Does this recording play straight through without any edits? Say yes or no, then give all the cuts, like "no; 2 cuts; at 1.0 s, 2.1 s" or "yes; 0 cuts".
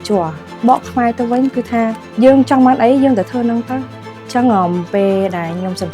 no; 1 cut; at 2.0 s